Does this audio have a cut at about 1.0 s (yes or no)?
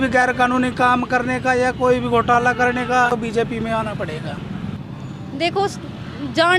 no